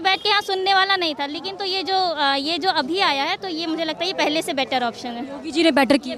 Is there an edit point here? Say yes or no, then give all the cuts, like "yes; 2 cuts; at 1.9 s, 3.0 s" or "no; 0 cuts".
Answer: no; 0 cuts